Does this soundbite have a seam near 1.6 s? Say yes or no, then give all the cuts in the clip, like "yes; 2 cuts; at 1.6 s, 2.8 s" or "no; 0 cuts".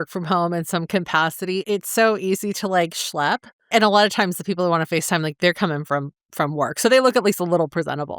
yes; 2 cuts; at 1.6 s, 3.7 s